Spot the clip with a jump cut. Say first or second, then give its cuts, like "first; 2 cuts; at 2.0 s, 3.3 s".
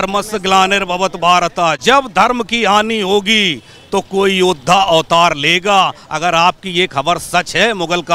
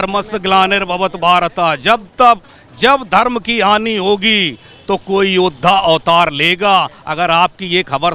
first; 1 cut; at 1.8 s